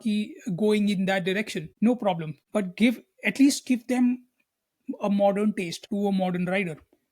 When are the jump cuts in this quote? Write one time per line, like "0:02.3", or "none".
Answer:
0:01.6
0:02.3
0:05.8

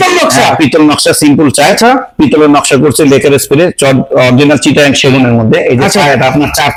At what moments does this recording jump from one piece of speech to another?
none

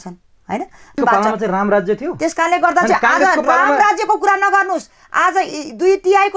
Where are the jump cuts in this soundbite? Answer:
0:01.0

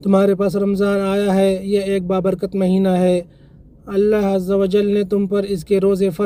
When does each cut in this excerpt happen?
none

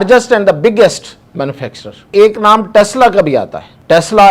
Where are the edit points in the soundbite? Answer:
0:02.1

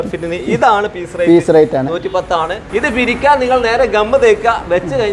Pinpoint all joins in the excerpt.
0:02.7

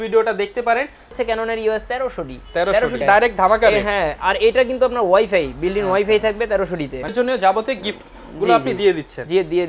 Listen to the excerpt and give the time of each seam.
0:01.1
0:03.0
0:07.1

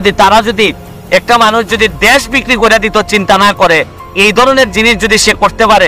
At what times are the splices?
0:00.9

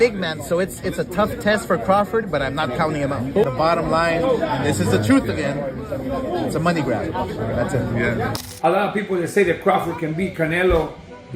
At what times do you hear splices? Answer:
0:08.4

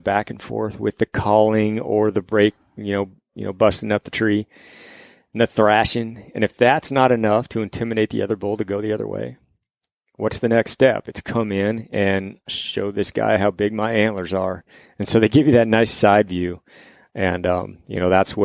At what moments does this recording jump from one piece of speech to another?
none

